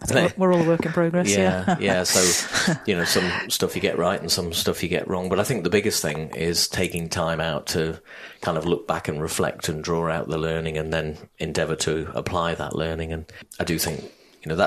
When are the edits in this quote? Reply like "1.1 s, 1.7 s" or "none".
13.4 s